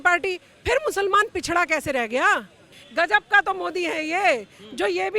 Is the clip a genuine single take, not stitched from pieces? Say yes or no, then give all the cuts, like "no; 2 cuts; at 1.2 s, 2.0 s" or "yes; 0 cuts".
no; 1 cut; at 2.7 s